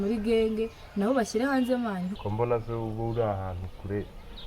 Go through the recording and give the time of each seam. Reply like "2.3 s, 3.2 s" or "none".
2.1 s